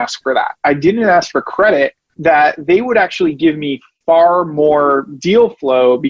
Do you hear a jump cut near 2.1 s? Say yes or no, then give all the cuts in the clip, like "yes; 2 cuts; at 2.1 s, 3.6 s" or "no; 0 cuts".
yes; 1 cut; at 2.1 s